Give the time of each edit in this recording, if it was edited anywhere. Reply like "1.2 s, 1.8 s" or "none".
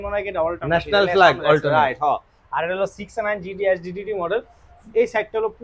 none